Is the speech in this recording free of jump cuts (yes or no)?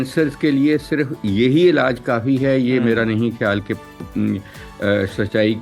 yes